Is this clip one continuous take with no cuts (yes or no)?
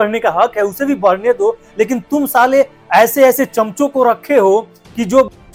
yes